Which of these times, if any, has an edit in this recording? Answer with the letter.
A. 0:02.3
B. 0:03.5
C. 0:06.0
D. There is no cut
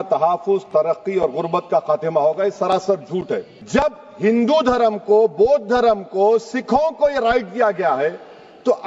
B